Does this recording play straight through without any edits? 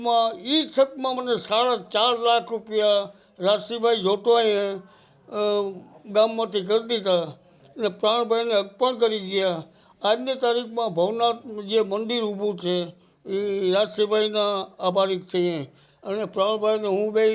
yes; 0 cuts

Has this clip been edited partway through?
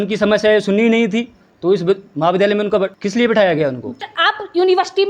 yes; 2 cuts; at 3.0 s, 4.2 s

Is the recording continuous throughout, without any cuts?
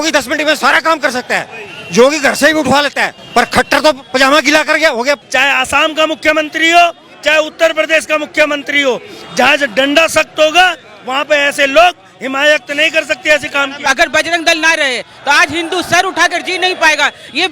no; 2 cuts; at 5.2 s, 13.8 s

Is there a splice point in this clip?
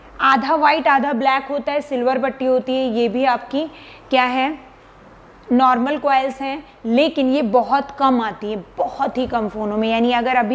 no; 0 cuts

